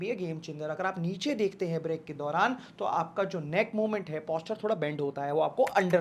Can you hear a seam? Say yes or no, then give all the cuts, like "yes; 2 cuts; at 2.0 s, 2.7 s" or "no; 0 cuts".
no; 0 cuts